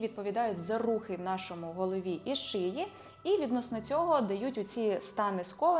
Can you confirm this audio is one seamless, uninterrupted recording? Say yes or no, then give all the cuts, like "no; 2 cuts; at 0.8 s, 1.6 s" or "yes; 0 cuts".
yes; 0 cuts